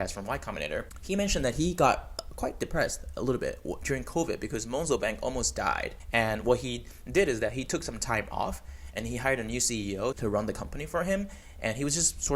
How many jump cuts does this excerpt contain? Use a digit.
2